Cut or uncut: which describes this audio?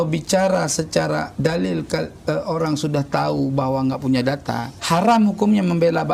uncut